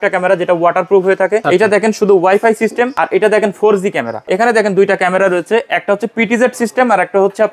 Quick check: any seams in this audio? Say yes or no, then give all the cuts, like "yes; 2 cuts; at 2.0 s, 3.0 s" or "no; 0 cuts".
yes; 3 cuts; at 1.4 s, 3.0 s, 4.2 s